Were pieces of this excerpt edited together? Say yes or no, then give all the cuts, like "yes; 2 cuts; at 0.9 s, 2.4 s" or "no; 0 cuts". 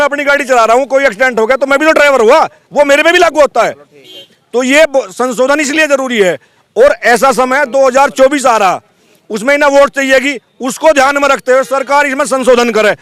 no; 0 cuts